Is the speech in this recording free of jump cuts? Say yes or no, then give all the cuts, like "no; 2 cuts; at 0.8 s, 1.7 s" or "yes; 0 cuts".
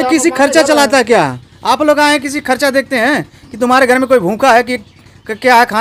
yes; 0 cuts